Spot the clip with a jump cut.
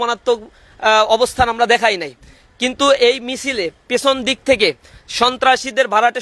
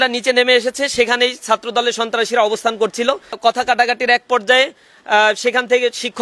second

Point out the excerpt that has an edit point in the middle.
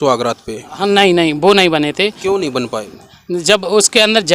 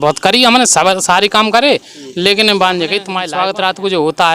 second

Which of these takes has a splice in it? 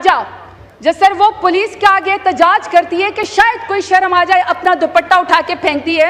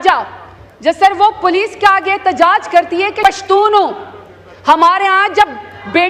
second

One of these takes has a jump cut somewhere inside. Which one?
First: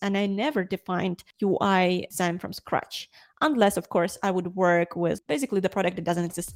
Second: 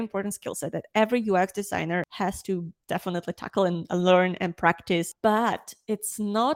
second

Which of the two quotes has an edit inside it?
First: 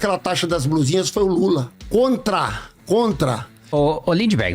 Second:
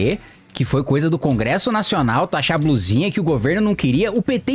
first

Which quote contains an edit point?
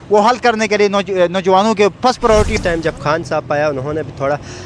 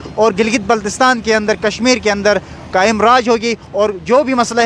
first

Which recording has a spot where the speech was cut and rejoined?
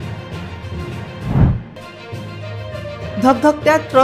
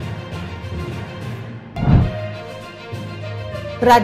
second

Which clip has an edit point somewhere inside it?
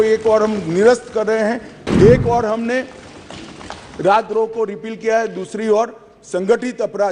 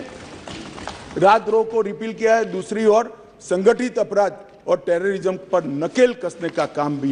first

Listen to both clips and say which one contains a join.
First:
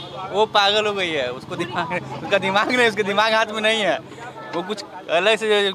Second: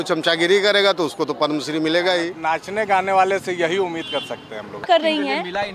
second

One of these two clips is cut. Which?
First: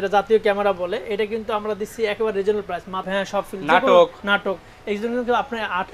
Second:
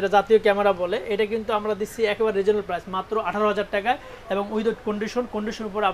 first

